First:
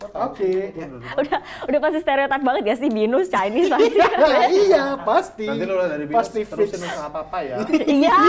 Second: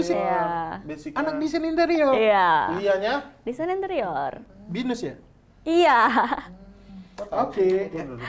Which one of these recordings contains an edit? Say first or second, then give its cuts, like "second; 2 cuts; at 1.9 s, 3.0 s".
second; 1 cut; at 4.4 s